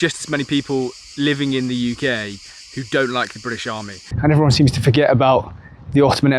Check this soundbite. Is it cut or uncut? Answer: cut